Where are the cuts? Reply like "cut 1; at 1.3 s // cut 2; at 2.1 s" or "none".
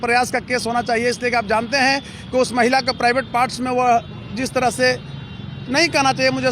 none

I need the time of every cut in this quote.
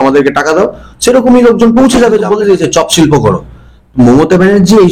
cut 1; at 2.3 s

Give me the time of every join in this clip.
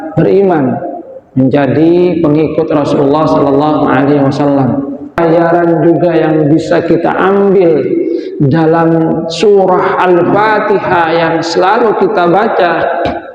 cut 1; at 5.2 s

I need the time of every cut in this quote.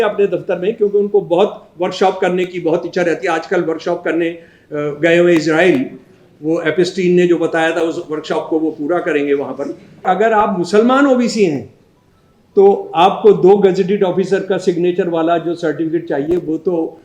cut 1; at 10.1 s

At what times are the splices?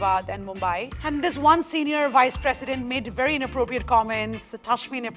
none

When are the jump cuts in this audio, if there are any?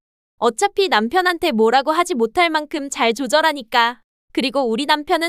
none

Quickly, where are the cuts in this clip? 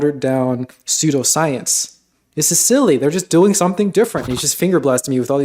cut 1; at 4.4 s

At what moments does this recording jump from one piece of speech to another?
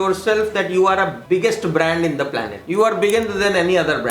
cut 1; at 1.2 s // cut 2; at 2.6 s

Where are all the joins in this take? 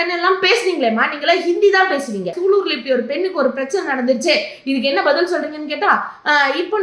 cut 1; at 2.3 s

